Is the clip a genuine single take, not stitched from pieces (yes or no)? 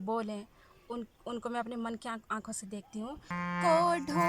no